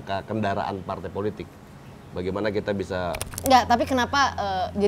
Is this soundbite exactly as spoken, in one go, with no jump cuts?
no; 1 cut; at 3.3 s

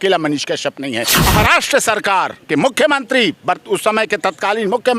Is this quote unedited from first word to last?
no; 1 cut; at 1.2 s

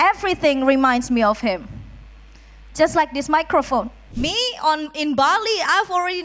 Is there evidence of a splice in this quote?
yes; 1 cut; at 4.0 s

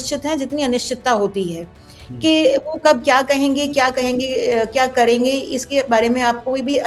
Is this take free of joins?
yes; 0 cuts

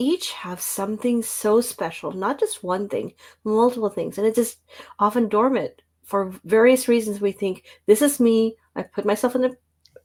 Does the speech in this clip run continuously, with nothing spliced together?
yes; 0 cuts

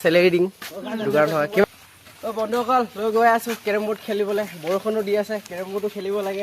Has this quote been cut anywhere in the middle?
yes; 1 cut; at 1.6 s

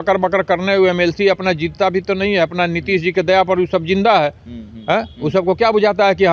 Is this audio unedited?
yes; 0 cuts

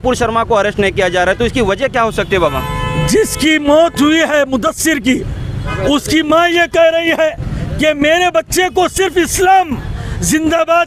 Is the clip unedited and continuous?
yes; 0 cuts

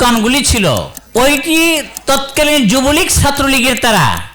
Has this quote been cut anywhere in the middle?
yes; 1 cut; at 1.0 s

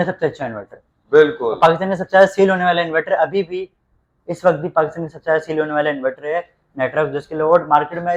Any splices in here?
no; 0 cuts

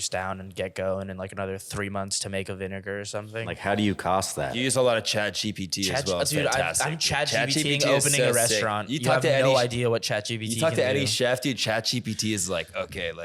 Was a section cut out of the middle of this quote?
yes; 2 cuts; at 3.5 s, 4.6 s

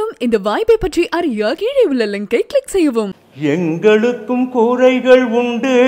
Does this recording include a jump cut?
yes; 1 cut; at 3.2 s

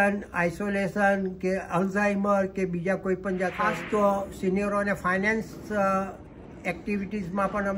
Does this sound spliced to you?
yes; 1 cut; at 3.6 s

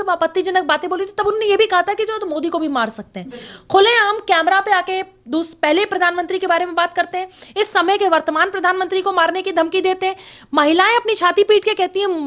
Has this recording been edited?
no; 0 cuts

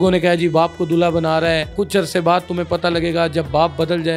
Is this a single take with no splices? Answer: no; 1 cut; at 1.7 s

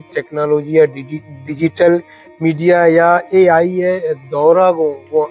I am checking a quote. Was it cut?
no; 0 cuts

